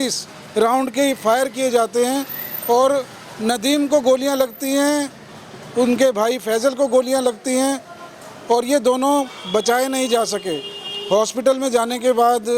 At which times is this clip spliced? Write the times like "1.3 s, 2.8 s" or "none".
none